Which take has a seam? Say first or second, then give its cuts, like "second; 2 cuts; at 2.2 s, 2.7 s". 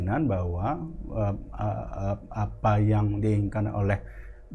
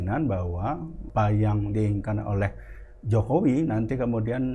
second; 1 cut; at 1.0 s